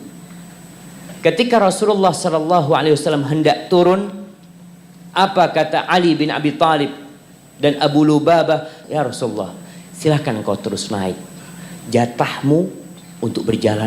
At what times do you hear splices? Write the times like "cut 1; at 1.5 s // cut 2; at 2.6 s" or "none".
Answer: cut 1; at 8.8 s